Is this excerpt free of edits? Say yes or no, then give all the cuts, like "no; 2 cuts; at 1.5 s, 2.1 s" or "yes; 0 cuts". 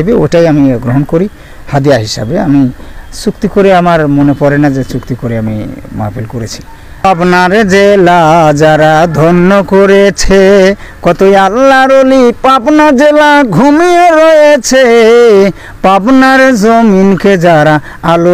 no; 1 cut; at 7.0 s